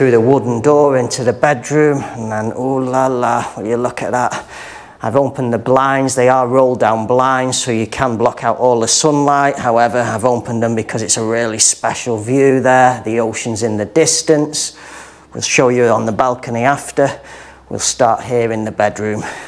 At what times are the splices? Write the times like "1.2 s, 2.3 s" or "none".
none